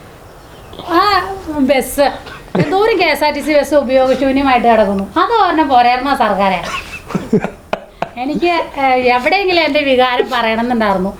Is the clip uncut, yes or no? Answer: yes